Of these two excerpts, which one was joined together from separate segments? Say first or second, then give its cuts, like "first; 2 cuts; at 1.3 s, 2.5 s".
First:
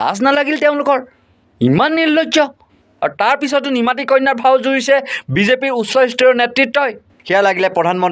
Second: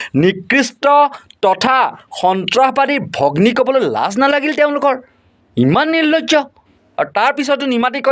first; 1 cut; at 7.1 s